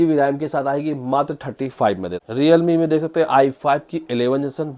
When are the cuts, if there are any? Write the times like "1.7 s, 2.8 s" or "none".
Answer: 2.2 s